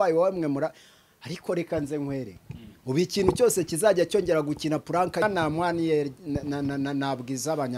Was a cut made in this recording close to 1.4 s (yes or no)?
no